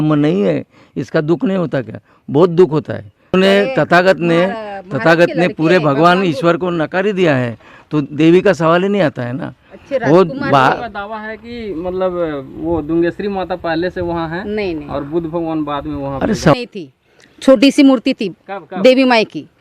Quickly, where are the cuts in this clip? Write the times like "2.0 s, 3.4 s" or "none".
3.3 s, 16.5 s